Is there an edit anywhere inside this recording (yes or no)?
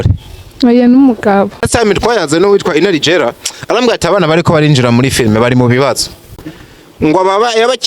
yes